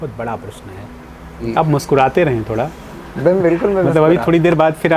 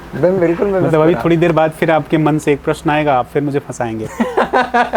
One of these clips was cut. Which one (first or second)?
first